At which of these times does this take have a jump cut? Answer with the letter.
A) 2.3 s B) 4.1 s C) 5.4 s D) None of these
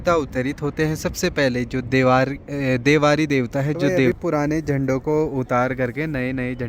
B